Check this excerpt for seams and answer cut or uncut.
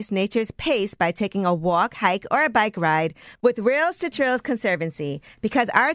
uncut